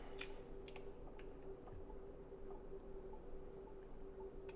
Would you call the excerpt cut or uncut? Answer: uncut